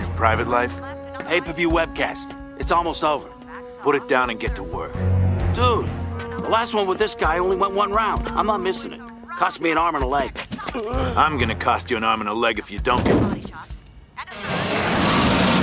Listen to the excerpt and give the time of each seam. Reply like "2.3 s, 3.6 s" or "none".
6.9 s